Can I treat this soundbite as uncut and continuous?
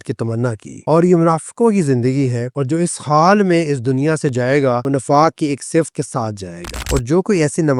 no; 1 cut; at 6.8 s

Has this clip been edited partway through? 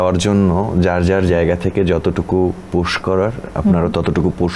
no; 0 cuts

